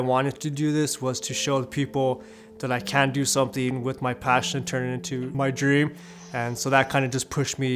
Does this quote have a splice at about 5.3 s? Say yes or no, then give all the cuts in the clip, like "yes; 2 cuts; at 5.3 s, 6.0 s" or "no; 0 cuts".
yes; 1 cut; at 5.3 s